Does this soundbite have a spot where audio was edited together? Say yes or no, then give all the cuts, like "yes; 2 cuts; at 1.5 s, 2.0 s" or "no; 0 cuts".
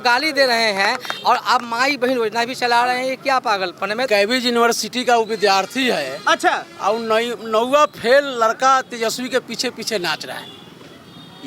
yes; 1 cut; at 4.1 s